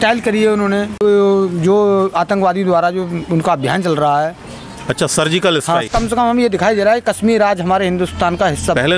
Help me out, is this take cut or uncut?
cut